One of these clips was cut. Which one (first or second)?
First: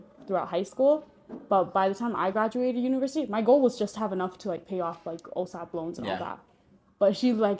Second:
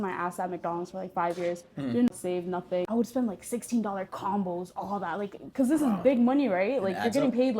second